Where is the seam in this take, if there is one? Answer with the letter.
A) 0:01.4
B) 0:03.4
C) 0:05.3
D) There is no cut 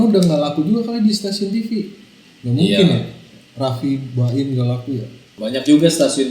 C